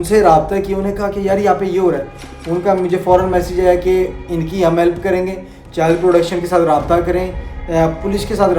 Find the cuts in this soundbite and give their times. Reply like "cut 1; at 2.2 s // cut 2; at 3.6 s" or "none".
none